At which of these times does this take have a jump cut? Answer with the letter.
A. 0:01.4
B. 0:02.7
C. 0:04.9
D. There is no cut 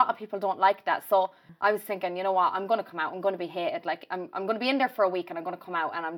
A